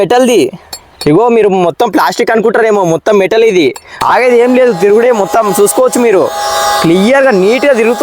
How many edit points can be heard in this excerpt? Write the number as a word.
one